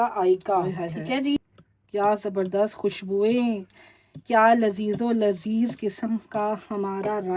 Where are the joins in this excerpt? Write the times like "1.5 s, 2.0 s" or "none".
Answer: 1.4 s